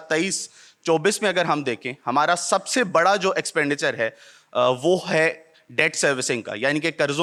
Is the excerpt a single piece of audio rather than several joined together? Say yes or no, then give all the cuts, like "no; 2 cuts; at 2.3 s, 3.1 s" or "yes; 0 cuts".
yes; 0 cuts